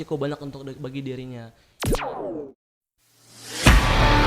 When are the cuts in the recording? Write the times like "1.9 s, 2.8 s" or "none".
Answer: 1.6 s